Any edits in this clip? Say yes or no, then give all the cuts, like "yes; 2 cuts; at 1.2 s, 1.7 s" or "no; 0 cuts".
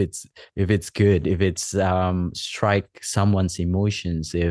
no; 0 cuts